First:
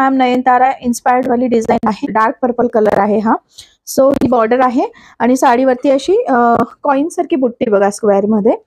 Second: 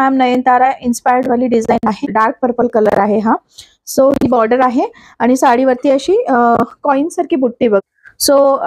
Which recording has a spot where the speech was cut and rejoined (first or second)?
second